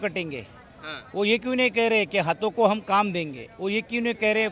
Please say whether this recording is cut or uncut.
uncut